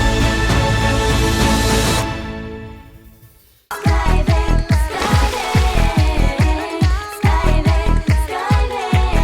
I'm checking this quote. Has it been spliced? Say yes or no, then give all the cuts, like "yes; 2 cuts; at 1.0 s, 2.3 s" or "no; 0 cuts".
yes; 1 cut; at 3.7 s